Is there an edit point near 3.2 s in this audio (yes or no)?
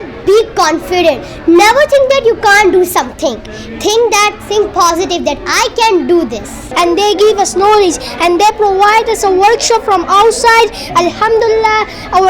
no